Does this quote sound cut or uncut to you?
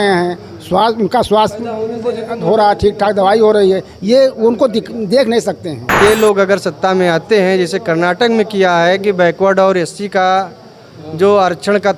cut